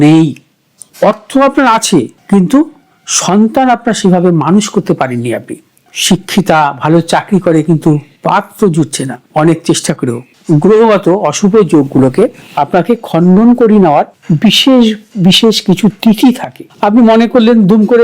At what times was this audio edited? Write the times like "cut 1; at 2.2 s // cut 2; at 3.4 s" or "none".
cut 1; at 0.9 s // cut 2; at 5.8 s // cut 3; at 10.3 s